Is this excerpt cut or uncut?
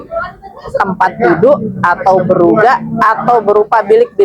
uncut